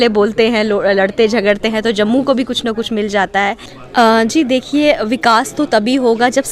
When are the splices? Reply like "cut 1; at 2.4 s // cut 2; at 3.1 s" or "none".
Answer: cut 1; at 3.7 s